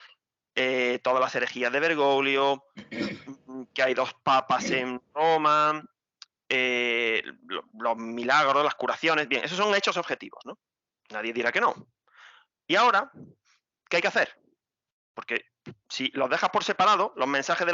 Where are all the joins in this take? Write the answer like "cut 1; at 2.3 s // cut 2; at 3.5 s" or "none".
none

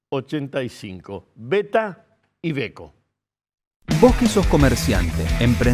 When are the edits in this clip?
cut 1; at 3.8 s

